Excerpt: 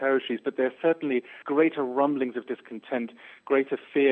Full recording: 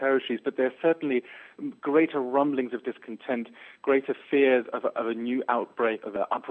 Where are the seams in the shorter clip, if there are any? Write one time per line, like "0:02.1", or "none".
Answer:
0:01.4